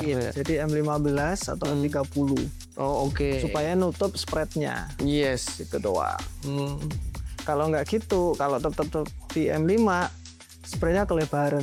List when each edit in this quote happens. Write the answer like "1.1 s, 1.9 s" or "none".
none